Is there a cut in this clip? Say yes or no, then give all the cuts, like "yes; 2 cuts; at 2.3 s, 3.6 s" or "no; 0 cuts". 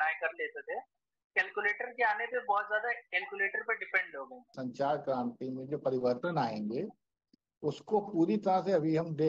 yes; 1 cut; at 4.5 s